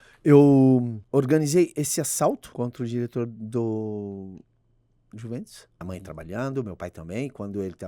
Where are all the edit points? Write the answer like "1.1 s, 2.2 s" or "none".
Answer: 1.0 s, 2.5 s, 5.8 s